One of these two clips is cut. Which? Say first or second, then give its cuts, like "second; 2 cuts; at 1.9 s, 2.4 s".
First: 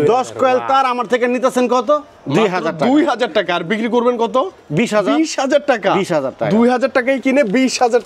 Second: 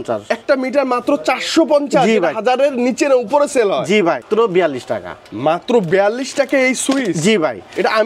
second; 1 cut; at 4.2 s